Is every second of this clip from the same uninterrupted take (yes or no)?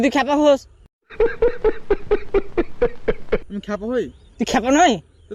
yes